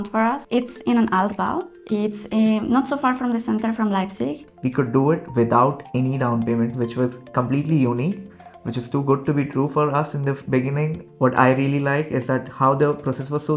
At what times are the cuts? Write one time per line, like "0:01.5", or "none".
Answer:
0:04.4
0:11.0